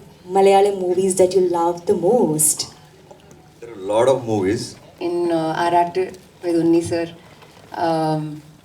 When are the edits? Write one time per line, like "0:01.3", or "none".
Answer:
0:04.9